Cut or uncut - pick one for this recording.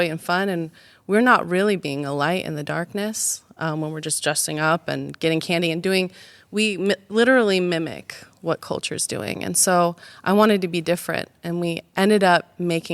uncut